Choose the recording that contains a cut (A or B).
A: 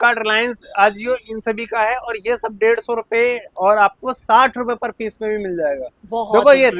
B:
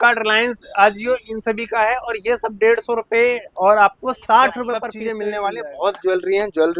B